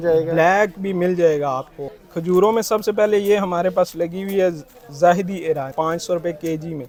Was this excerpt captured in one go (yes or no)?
yes